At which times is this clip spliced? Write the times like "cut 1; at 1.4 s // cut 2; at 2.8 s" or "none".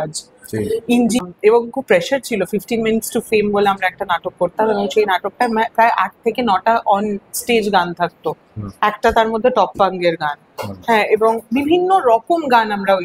cut 1; at 1.2 s

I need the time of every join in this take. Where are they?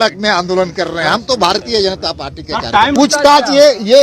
cut 1; at 2.9 s

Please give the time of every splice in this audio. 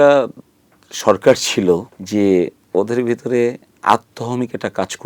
cut 1; at 1.9 s // cut 2; at 2.6 s

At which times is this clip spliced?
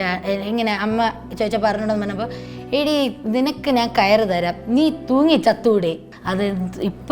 cut 1; at 6.1 s

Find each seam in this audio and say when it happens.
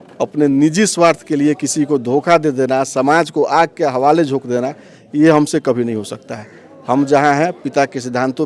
none

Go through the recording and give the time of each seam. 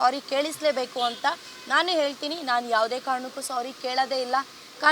none

